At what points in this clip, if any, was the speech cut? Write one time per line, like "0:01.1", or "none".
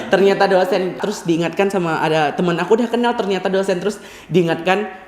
0:01.0